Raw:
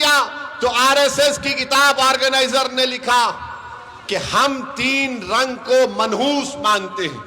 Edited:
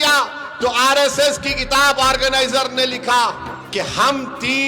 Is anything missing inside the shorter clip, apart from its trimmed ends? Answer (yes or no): yes